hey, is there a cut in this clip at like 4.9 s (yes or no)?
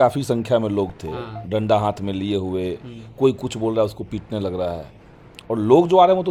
no